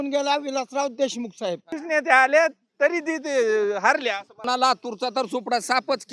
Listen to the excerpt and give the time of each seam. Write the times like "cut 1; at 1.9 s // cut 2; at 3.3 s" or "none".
cut 1; at 1.7 s // cut 2; at 4.4 s